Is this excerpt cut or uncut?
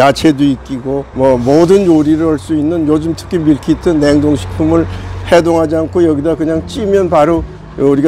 uncut